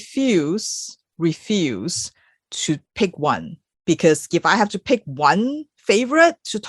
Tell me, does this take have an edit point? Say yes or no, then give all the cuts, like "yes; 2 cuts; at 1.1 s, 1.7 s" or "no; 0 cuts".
no; 0 cuts